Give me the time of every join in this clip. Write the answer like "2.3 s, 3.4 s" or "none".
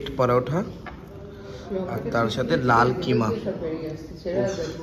none